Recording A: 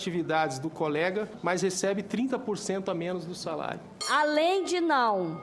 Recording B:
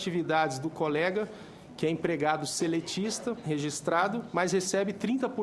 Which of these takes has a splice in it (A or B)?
A